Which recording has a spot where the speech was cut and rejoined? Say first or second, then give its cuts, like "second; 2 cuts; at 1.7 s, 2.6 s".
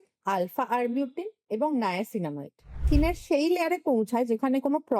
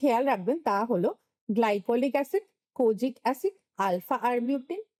first; 1 cut; at 2.8 s